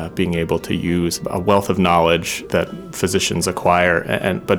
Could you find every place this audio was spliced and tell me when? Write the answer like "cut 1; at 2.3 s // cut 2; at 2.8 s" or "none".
cut 1; at 1.2 s // cut 2; at 2.4 s